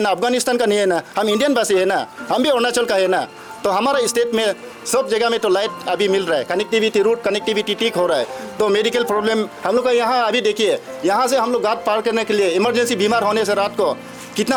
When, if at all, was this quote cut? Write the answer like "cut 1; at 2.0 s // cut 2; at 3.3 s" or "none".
none